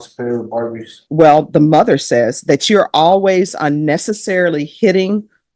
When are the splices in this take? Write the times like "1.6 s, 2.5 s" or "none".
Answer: 1.0 s